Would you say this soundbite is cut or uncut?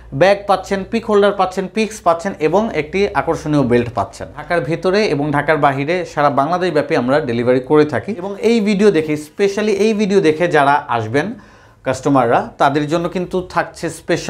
cut